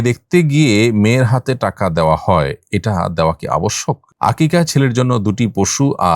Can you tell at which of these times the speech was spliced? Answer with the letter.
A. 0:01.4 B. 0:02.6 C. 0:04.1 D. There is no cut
C